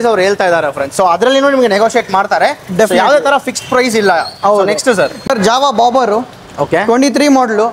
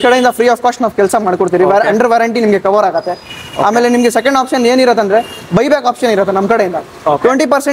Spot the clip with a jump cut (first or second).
first